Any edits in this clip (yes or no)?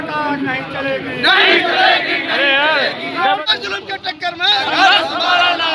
yes